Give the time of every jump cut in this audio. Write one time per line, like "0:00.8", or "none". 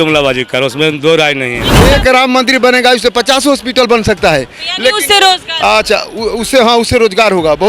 0:01.7